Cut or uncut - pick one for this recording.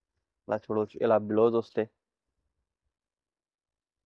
uncut